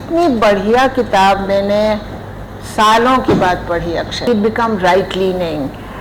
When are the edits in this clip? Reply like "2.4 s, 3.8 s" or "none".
4.2 s